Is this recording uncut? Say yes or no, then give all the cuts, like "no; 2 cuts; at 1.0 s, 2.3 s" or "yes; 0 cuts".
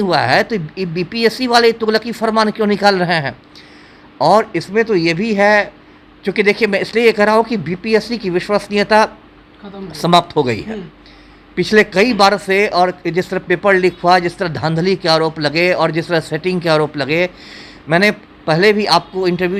yes; 0 cuts